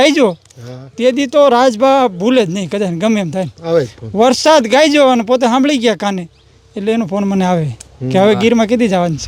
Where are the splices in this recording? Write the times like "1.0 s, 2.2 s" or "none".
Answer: none